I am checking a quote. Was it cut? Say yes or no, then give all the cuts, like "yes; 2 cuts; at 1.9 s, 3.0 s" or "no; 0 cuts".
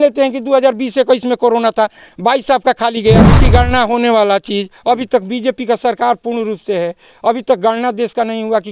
yes; 1 cut; at 3.3 s